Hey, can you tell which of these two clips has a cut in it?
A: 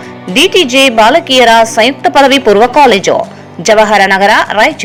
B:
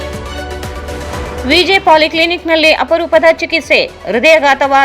B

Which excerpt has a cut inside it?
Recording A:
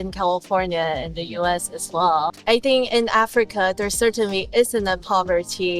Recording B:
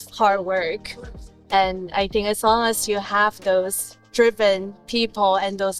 A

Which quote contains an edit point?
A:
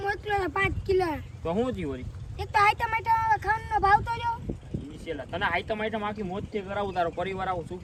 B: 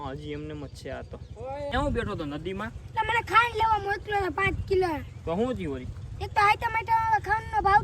B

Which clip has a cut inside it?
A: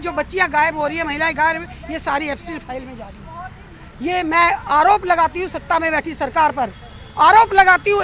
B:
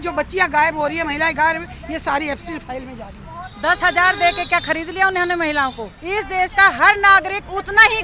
B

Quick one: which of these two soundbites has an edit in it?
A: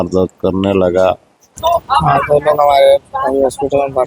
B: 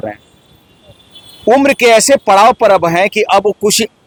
A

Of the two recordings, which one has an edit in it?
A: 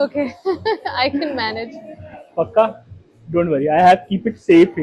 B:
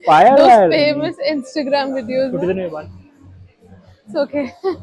B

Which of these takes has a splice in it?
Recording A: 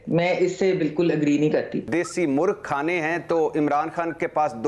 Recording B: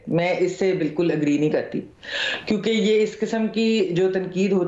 A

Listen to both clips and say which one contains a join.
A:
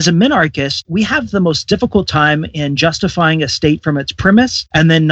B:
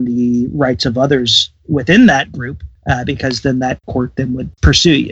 B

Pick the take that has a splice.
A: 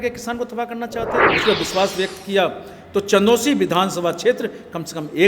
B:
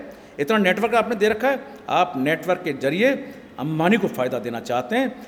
A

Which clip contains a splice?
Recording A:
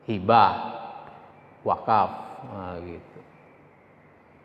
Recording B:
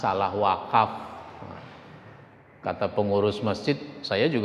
B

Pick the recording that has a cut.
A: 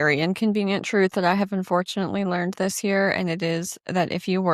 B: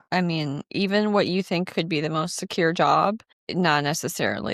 B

